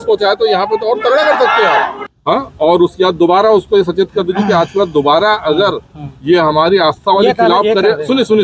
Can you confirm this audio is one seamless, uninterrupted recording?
no; 1 cut; at 2.0 s

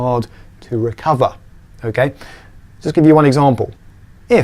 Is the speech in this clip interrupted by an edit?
yes; 1 cut; at 2.4 s

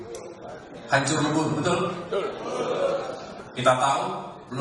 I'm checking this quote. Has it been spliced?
yes; 1 cut; at 3.3 s

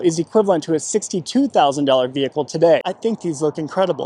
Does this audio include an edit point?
yes; 1 cut; at 2.9 s

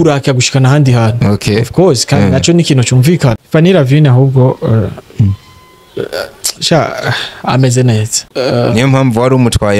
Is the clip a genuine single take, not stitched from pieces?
no; 2 cuts; at 3.4 s, 8.2 s

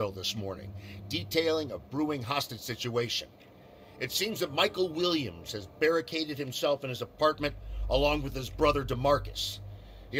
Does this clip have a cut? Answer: yes; 1 cut; at 9.1 s

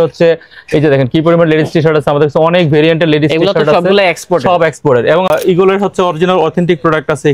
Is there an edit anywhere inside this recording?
yes; 1 cut; at 5.3 s

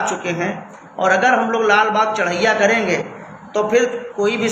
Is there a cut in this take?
no; 0 cuts

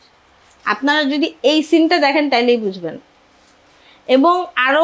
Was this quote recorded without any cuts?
yes; 0 cuts

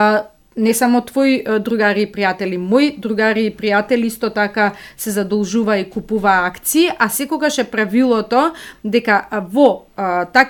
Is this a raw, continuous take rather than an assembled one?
yes; 0 cuts

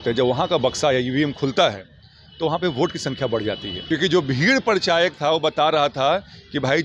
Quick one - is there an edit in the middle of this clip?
yes; 1 cut; at 3.7 s

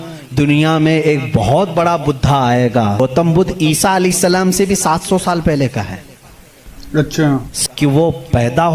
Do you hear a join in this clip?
yes; 2 cuts; at 3.0 s, 7.5 s

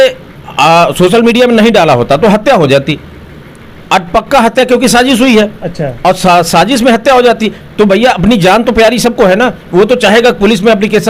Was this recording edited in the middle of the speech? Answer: no; 0 cuts

